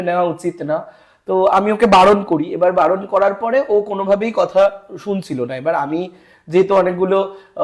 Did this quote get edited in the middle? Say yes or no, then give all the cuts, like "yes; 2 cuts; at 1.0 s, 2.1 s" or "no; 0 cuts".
no; 0 cuts